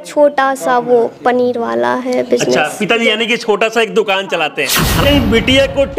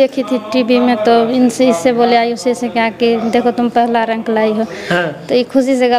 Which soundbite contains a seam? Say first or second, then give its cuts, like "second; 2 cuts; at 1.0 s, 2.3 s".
first; 1 cut; at 5.0 s